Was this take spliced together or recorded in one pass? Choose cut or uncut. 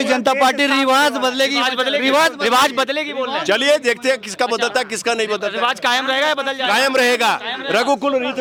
uncut